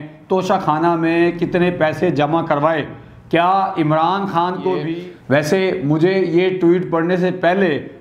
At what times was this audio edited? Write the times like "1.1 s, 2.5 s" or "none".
4.9 s